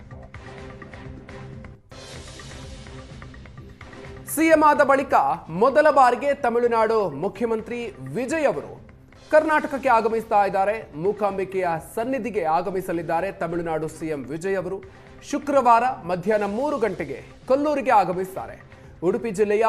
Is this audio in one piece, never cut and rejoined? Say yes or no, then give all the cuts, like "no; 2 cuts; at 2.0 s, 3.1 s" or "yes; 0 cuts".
no; 1 cut; at 1.2 s